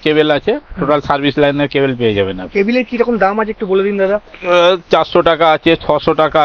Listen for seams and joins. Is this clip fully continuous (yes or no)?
yes